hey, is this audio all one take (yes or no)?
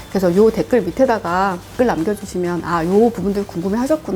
yes